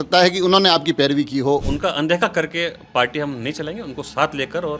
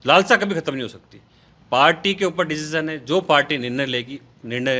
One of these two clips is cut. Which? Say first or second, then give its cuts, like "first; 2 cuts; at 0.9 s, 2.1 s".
first; 1 cut; at 1.6 s